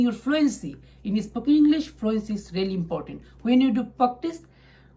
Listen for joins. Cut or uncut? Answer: uncut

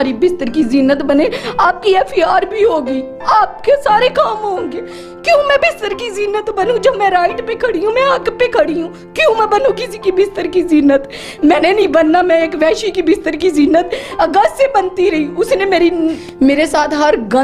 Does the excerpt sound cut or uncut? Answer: cut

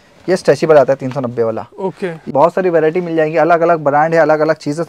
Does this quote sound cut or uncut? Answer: cut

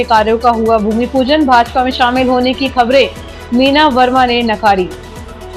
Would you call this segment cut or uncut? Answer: uncut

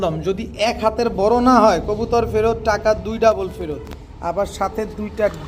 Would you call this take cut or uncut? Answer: uncut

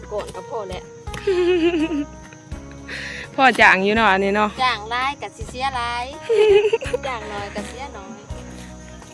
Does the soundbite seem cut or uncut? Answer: uncut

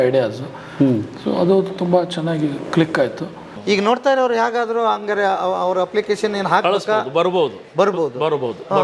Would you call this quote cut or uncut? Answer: cut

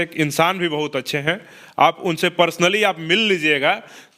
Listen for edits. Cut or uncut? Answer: uncut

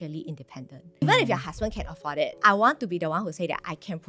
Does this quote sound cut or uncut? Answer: cut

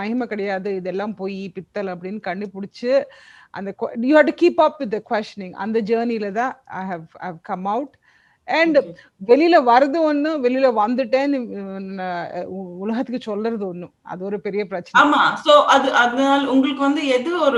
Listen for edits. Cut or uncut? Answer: uncut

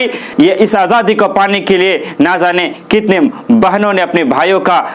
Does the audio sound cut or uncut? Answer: uncut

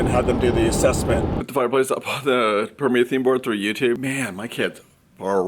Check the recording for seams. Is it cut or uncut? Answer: cut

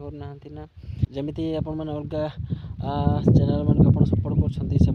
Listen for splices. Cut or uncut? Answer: cut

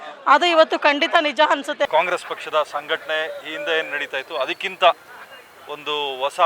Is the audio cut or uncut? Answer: cut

